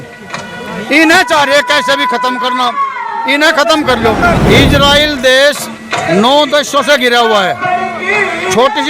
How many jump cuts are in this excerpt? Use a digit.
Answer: 1